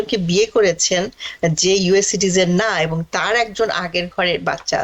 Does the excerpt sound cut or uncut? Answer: uncut